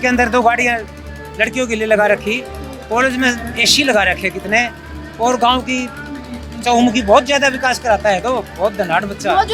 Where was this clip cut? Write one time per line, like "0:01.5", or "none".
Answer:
none